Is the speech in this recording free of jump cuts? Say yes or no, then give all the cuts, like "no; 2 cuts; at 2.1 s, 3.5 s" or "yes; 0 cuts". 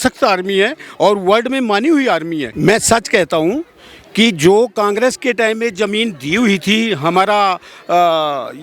no; 1 cut; at 2.5 s